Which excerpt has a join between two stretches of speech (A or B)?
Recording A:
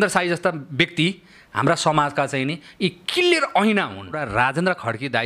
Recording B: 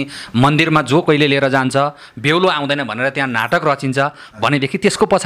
A